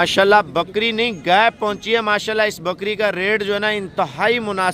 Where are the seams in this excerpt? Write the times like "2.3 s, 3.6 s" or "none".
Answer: none